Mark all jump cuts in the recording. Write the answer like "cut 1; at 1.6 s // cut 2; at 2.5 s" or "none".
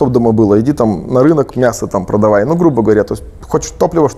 none